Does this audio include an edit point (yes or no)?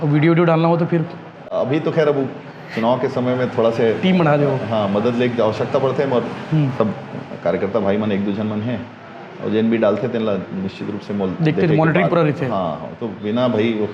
no